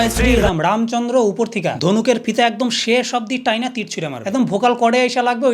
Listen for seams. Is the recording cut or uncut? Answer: uncut